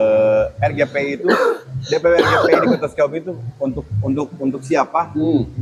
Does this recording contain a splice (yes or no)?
no